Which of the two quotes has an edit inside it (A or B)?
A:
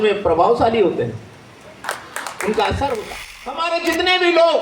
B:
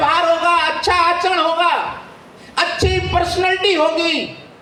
A